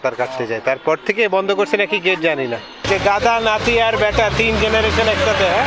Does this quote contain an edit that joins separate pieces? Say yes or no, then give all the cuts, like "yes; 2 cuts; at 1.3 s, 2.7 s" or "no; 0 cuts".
yes; 1 cut; at 2.7 s